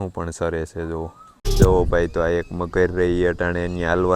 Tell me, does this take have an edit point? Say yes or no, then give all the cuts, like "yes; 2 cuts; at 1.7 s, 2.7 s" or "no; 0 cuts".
yes; 1 cut; at 1.5 s